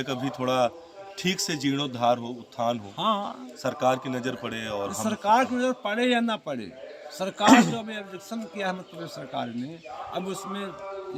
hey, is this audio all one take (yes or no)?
yes